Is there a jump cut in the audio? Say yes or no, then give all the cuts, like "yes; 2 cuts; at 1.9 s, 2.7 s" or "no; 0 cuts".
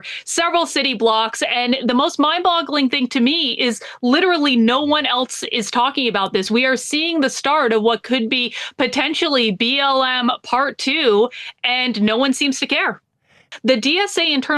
yes; 1 cut; at 13.5 s